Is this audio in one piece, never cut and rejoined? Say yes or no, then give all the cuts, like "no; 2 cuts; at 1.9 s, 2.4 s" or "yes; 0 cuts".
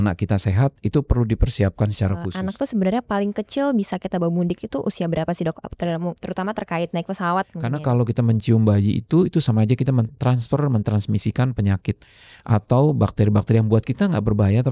no; 2 cuts; at 2.3 s, 7.6 s